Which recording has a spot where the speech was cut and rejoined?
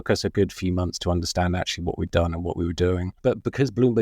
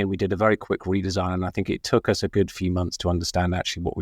first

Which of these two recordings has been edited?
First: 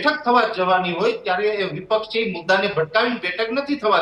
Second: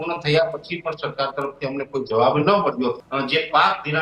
second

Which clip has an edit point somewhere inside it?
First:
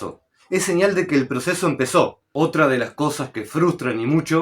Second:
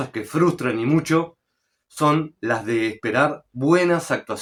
first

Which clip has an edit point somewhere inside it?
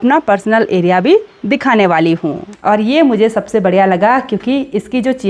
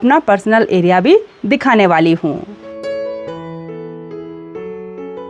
first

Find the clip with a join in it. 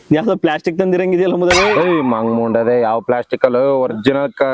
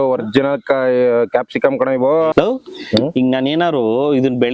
second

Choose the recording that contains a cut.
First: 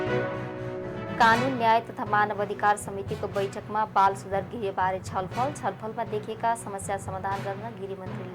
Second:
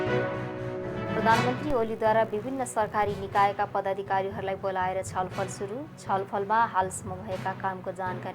second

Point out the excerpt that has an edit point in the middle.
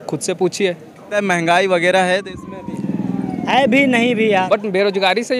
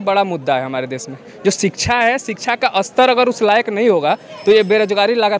first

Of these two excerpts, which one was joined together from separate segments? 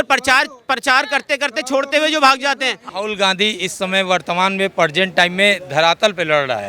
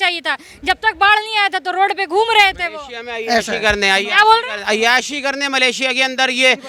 first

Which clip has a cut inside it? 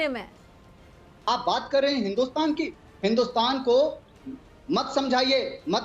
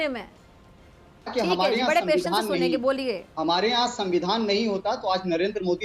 first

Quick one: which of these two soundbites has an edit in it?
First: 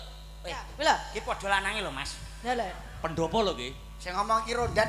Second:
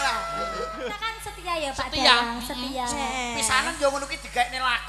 second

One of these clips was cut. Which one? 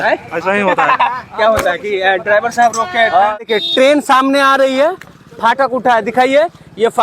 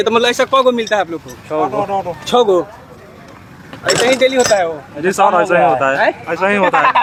first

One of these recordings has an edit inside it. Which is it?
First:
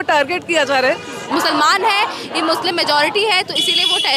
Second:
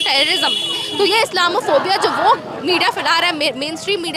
first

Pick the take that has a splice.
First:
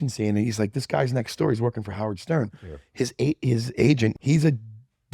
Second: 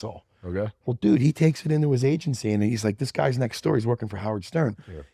first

